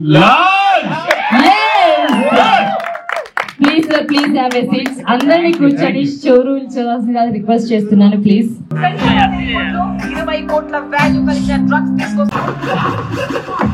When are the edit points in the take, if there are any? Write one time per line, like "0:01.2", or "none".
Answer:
none